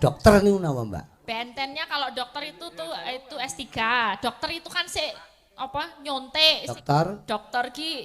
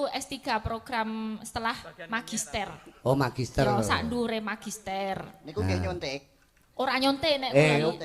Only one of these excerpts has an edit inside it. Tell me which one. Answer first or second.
first